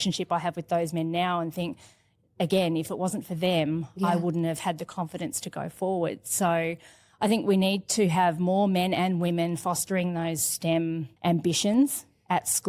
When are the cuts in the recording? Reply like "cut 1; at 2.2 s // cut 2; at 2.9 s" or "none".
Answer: none